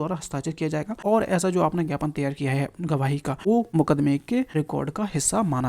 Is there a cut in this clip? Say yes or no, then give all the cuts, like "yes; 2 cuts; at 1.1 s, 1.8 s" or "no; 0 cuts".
yes; 3 cuts; at 0.9 s, 3.6 s, 4.5 s